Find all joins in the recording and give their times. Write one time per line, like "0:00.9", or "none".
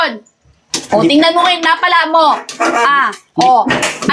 none